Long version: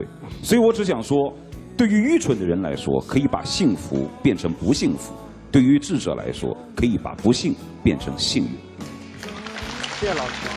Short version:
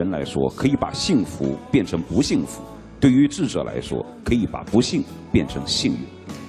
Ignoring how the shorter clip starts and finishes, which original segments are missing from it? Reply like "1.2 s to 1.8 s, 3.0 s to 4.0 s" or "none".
none

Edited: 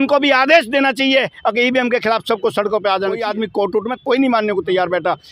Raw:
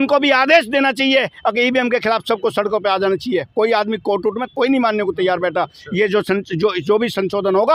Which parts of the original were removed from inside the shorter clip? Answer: 3.2 s to 3.7 s

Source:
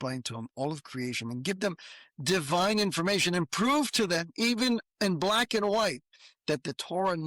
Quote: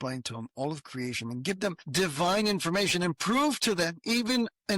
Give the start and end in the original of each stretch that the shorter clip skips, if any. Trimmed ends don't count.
1.8 s to 2.1 s

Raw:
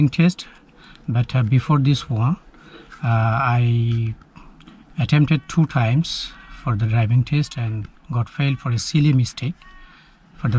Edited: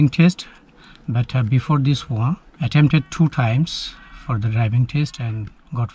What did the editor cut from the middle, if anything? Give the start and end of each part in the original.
2.5 s to 4.9 s

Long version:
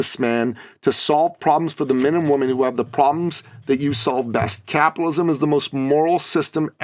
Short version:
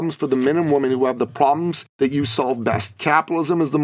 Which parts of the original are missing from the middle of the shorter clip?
3.4 s to 3.5 s

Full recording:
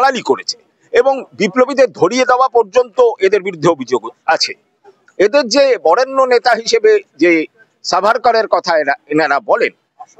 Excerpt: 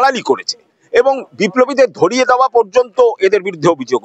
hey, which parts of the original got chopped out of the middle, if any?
none

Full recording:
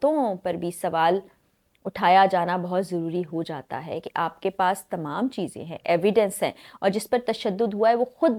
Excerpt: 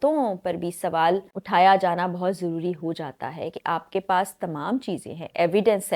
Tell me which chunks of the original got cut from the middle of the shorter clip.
1.3 s to 1.8 s

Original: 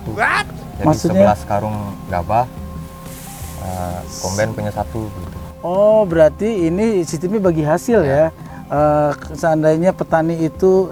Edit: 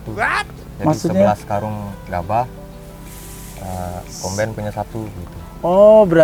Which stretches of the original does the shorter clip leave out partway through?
none

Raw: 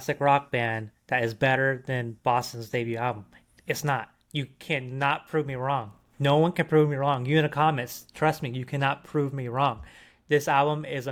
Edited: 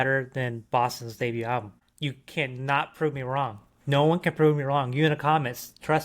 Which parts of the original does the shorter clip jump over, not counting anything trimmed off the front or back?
3.4 s to 4.2 s

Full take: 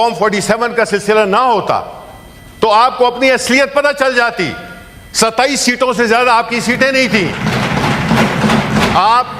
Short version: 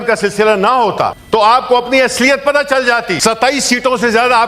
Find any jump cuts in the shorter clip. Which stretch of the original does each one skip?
1.9 s to 2.5 s, 4.4 s to 5.1 s

